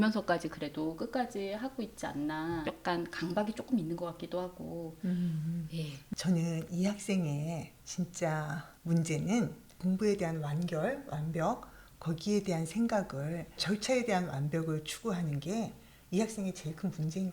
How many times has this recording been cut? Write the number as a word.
three